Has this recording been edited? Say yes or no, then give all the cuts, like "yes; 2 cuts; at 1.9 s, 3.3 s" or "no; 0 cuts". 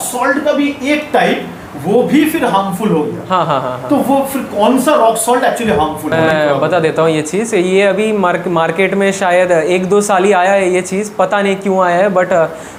no; 0 cuts